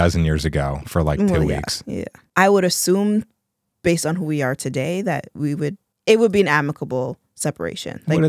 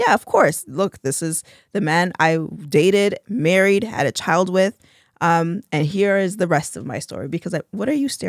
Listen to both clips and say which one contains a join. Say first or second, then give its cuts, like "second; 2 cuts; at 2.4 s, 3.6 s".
first; 2 cuts; at 2.1 s, 5.9 s